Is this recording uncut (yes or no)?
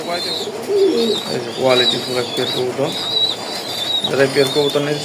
yes